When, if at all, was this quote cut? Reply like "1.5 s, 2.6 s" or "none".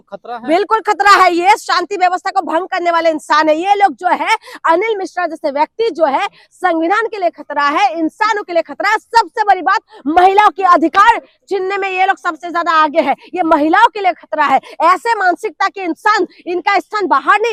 none